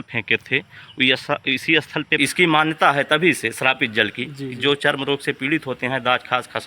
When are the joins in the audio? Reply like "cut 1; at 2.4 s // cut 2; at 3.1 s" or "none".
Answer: cut 1; at 2.1 s

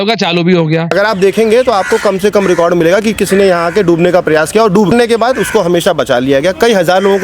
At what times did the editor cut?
cut 1; at 0.9 s // cut 2; at 4.9 s

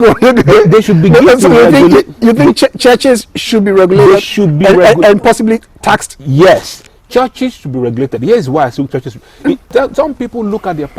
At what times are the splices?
cut 1; at 9.7 s

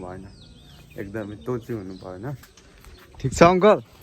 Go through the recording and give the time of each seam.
cut 1; at 2.5 s

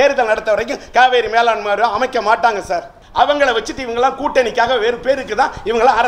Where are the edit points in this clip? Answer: cut 1; at 3.0 s

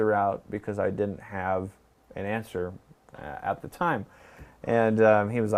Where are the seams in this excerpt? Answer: none

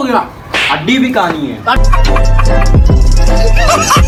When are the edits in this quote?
none

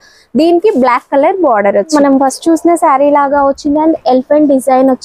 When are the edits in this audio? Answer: cut 1; at 1.9 s

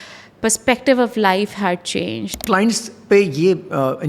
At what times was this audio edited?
cut 1; at 2.3 s

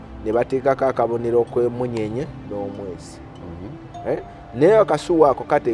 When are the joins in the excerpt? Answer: none

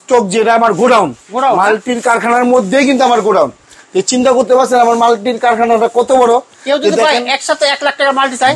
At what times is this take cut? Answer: none

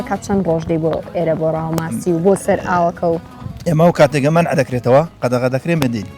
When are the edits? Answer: cut 1; at 5.2 s

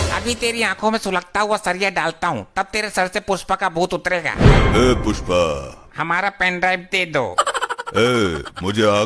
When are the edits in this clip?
cut 1; at 5.8 s

